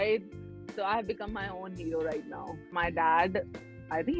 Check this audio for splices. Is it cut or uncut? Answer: cut